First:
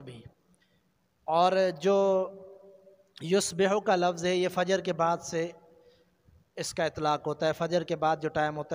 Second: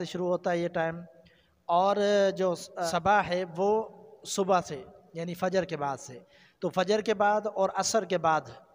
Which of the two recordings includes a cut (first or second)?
second